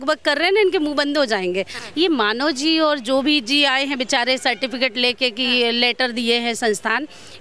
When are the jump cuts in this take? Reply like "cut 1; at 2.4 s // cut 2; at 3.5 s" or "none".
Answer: cut 1; at 1.8 s